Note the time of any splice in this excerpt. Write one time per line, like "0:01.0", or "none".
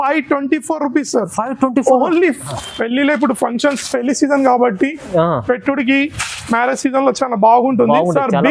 0:02.5